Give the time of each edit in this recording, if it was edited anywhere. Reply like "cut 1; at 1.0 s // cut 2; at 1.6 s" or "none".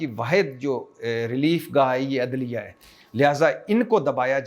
none